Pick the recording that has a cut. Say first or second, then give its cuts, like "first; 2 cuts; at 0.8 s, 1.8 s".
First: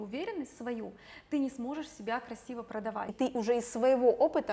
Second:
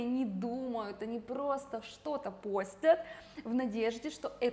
first; 1 cut; at 3.1 s